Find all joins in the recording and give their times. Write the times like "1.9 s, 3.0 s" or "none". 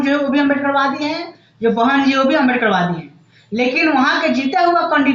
none

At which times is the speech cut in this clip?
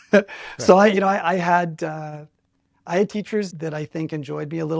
3.5 s

